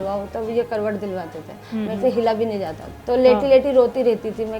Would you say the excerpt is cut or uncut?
cut